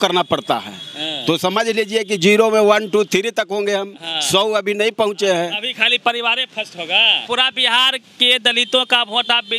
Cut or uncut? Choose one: cut